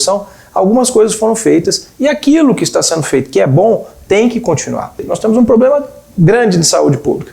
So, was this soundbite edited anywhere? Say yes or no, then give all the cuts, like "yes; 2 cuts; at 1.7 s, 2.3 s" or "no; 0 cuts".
yes; 1 cut; at 5.1 s